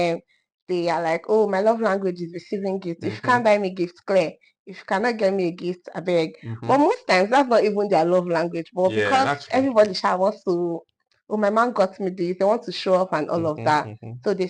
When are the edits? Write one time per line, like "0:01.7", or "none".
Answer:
none